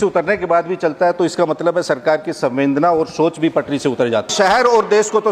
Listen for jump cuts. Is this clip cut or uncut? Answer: cut